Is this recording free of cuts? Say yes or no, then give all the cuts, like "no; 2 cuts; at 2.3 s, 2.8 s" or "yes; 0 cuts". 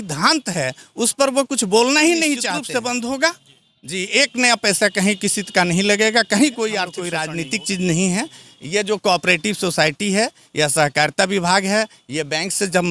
no; 2 cuts; at 2.6 s, 7.3 s